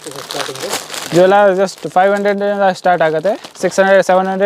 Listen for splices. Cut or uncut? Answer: uncut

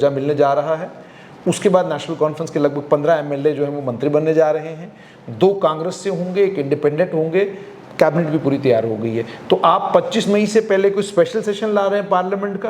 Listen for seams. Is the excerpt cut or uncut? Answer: uncut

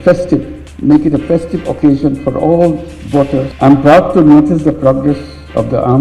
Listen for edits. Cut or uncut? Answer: cut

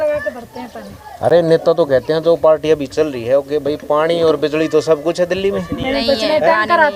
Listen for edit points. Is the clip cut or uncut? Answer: uncut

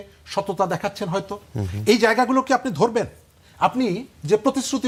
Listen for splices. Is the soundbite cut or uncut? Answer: uncut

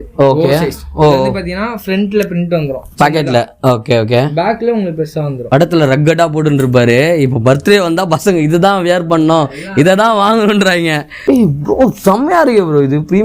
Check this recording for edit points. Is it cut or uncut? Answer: cut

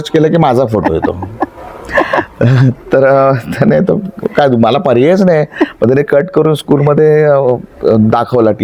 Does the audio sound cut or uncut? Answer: uncut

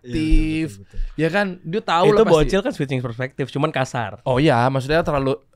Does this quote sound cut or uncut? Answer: uncut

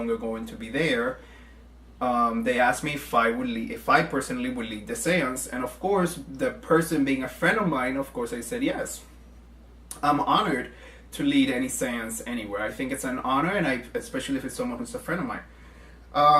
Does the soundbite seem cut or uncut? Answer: cut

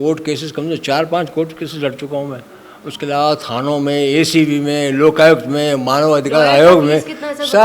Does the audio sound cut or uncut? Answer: uncut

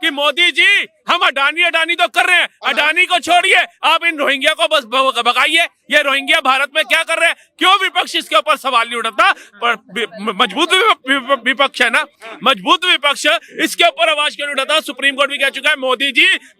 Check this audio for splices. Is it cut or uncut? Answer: uncut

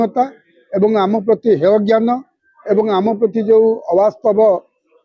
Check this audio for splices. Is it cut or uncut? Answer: uncut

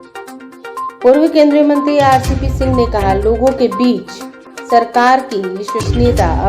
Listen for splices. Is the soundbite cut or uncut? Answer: cut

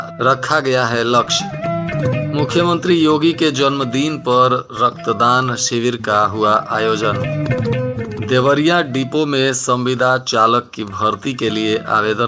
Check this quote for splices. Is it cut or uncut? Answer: uncut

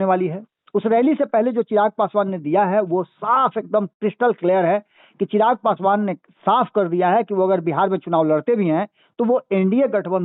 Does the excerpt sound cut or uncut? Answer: uncut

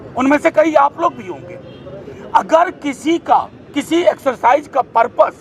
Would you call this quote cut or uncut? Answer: uncut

